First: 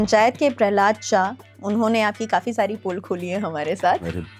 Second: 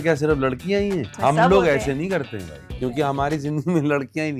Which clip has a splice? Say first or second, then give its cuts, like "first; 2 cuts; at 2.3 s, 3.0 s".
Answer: second; 2 cuts; at 1.1 s, 2.9 s